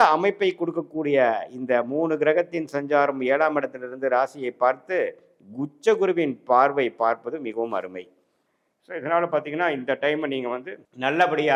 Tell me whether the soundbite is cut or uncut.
uncut